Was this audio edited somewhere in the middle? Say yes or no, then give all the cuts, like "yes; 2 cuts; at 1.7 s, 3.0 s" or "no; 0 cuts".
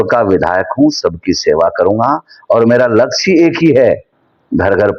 no; 0 cuts